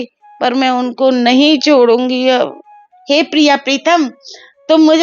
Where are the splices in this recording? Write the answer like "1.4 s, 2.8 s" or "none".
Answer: 2.9 s